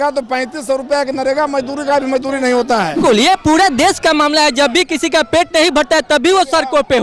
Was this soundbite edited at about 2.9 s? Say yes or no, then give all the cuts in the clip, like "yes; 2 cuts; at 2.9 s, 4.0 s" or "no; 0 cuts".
yes; 1 cut; at 2.9 s